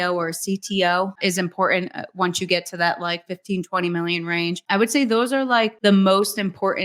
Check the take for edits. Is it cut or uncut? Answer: cut